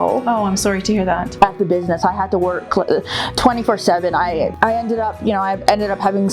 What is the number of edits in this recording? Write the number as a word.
two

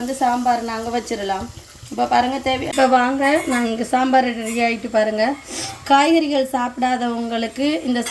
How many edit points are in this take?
one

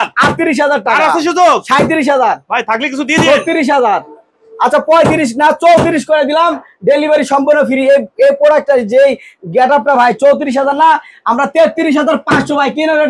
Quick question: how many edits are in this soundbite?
zero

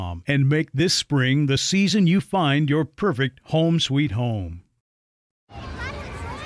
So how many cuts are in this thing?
one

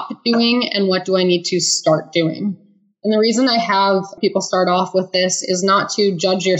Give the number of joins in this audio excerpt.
one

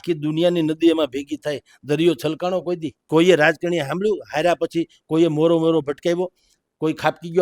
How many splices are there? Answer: one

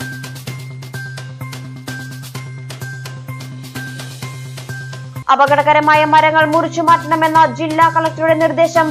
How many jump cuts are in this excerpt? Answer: one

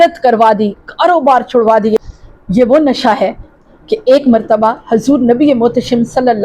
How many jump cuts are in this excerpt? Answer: one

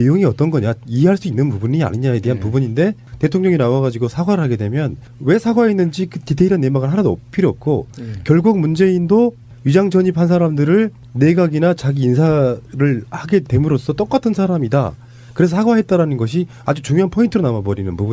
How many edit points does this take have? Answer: one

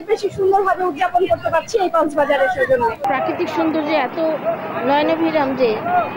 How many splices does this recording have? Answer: one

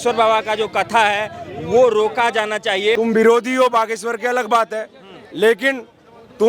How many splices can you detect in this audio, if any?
one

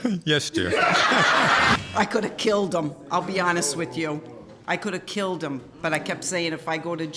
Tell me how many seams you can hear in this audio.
one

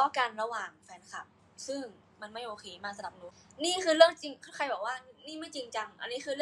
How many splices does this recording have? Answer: one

